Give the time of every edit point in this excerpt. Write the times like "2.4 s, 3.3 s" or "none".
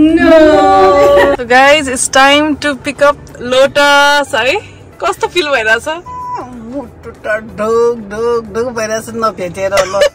1.3 s